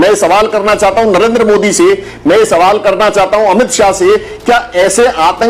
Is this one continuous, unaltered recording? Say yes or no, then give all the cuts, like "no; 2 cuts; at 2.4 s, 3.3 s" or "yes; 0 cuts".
yes; 0 cuts